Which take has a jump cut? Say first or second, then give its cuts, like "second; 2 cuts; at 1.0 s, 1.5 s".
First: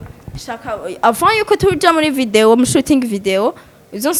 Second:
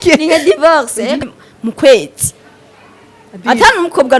second; 1 cut; at 1.2 s